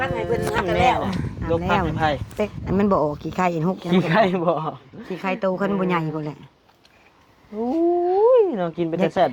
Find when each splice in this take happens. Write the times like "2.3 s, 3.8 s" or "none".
2.6 s